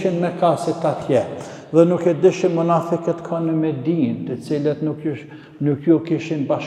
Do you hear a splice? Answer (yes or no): no